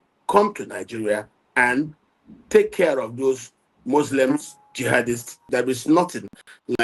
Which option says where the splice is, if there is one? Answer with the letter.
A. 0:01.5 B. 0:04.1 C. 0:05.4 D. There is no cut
C